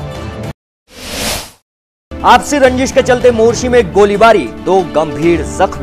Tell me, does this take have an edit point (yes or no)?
yes